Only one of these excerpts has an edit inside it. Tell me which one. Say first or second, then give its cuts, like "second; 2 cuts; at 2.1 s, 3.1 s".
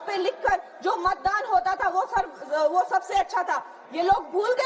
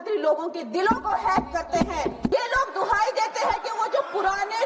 second; 1 cut; at 2.3 s